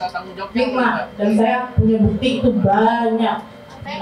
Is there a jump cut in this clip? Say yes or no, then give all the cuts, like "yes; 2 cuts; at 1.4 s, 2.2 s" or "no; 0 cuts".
no; 0 cuts